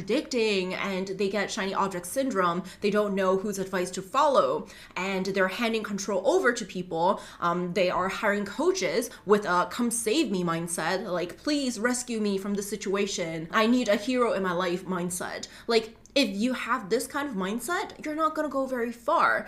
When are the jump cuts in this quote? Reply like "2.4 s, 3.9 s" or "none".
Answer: 13.4 s

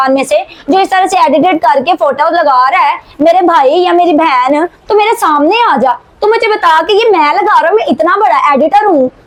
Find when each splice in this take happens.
none

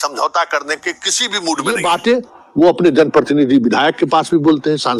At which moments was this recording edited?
1.8 s

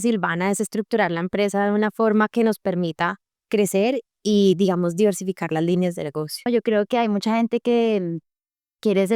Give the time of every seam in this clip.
6.5 s

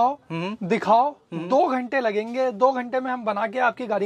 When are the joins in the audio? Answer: none

